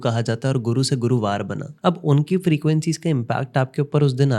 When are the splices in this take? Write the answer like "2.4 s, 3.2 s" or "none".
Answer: 1.6 s

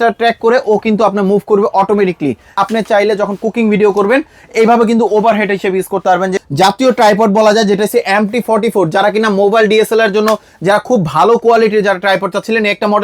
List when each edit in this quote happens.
2.6 s, 6.4 s

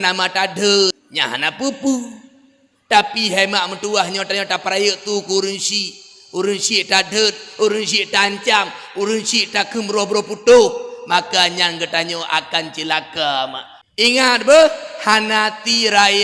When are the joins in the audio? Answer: 1.0 s, 13.7 s

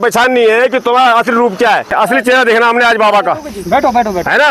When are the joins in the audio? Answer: 1.9 s

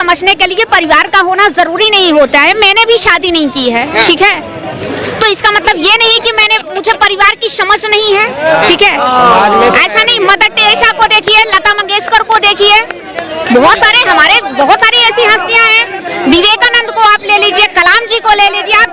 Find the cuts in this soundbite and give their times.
none

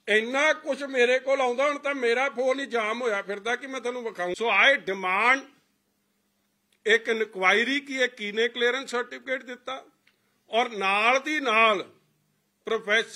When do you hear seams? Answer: 4.3 s

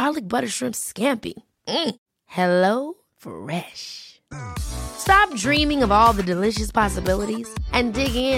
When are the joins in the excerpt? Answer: none

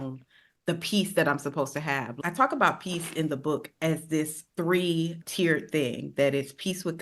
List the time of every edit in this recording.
2.2 s, 4.4 s

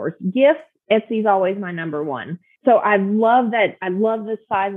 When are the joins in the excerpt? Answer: 2.5 s

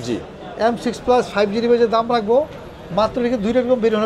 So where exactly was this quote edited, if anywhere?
none

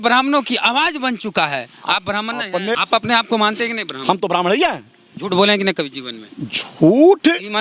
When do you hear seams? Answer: 2.8 s

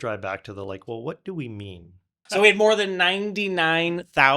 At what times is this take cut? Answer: 2.2 s

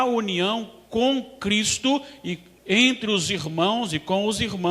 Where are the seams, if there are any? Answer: 3.2 s

